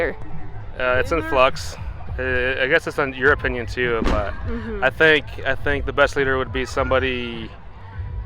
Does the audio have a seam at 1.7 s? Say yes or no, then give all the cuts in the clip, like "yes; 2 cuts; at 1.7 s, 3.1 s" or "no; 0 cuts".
no; 0 cuts